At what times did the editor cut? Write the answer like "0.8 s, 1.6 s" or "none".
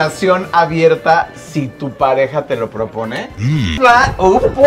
3.8 s